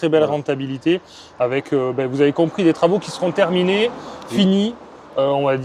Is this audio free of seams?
yes; 0 cuts

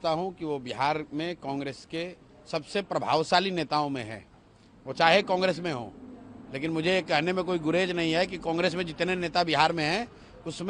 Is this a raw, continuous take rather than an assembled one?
yes; 0 cuts

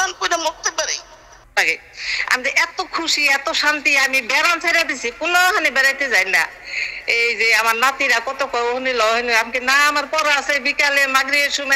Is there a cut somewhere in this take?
yes; 1 cut; at 1.5 s

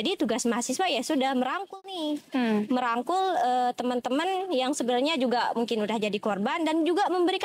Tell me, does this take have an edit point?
no; 0 cuts

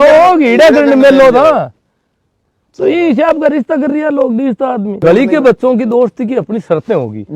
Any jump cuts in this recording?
yes; 1 cut; at 5.0 s

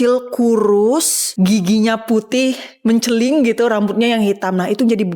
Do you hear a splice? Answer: yes; 1 cut; at 1.2 s

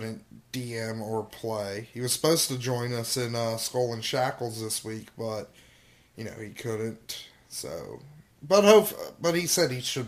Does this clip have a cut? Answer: no; 0 cuts

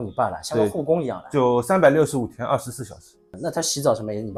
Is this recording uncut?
yes; 0 cuts

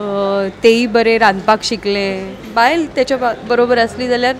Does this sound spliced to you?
yes; 1 cut; at 2.3 s

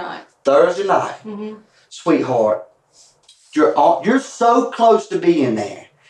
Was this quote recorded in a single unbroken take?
yes; 0 cuts

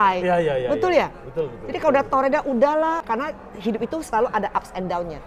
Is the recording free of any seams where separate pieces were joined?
yes; 0 cuts

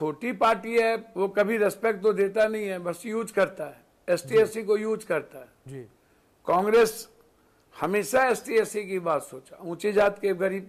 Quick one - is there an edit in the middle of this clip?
yes; 1 cut; at 1.1 s

